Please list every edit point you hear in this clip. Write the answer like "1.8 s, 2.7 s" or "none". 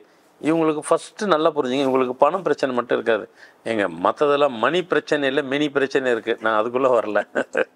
none